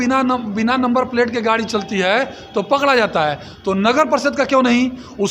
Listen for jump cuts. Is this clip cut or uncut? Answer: uncut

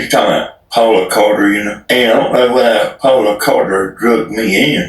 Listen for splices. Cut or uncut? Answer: cut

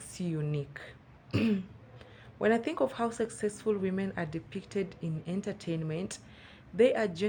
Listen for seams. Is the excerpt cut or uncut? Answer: uncut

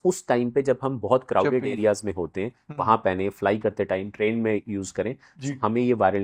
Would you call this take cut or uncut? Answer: uncut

